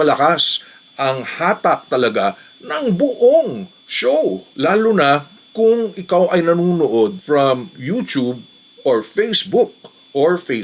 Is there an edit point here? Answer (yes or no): no